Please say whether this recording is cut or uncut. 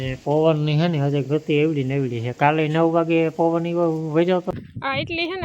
cut